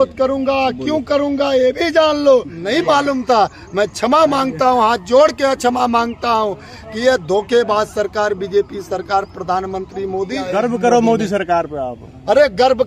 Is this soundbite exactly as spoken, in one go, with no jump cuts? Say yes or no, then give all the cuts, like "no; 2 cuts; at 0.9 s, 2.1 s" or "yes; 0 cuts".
no; 2 cuts; at 2.6 s, 10.5 s